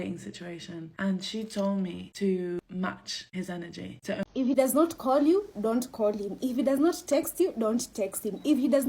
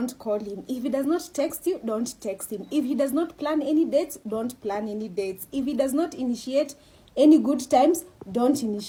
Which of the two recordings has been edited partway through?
first; 1 cut; at 4.2 s

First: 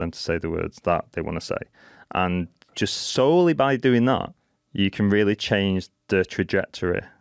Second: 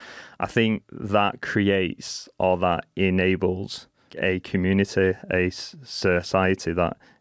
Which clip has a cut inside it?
second; 2 cuts; at 0.9 s, 4.1 s

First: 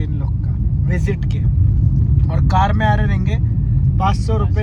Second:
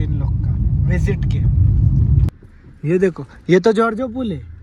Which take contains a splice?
second; 1 cut; at 2.3 s

